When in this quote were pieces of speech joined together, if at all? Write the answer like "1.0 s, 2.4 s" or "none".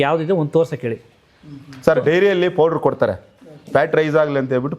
none

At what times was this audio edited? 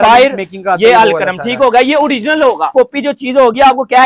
2.7 s

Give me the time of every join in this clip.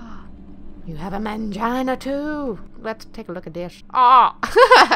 2.7 s, 3.8 s

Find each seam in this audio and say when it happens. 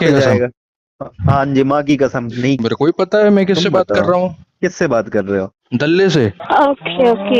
2.6 s, 6.4 s

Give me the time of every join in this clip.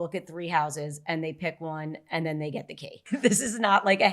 3.1 s

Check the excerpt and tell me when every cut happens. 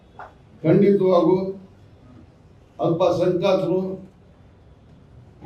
none

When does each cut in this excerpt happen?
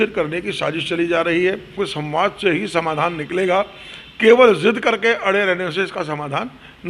1.8 s

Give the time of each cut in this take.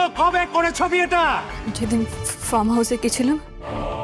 1.6 s

